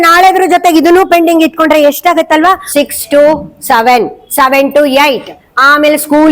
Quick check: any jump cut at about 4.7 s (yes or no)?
no